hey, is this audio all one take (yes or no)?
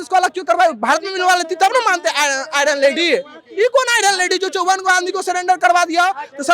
yes